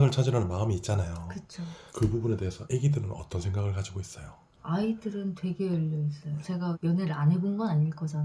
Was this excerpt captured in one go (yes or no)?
yes